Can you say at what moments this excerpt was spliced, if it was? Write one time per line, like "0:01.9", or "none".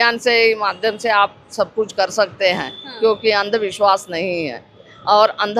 none